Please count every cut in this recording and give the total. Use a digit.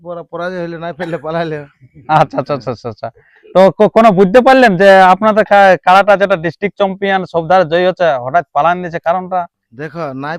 0